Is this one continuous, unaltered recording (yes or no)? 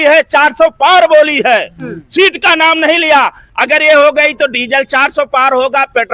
yes